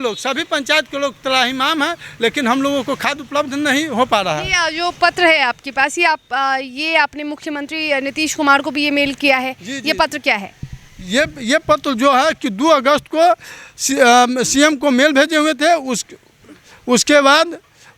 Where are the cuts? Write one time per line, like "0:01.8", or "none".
none